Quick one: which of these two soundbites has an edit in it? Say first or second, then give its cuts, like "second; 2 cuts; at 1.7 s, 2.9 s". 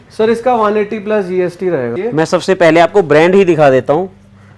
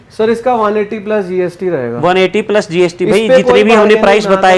first; 1 cut; at 1.9 s